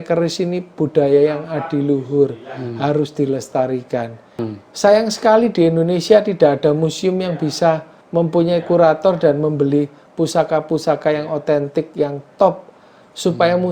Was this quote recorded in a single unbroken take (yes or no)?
no